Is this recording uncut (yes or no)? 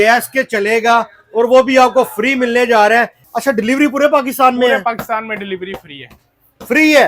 no